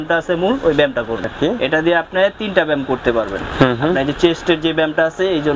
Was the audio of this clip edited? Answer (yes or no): yes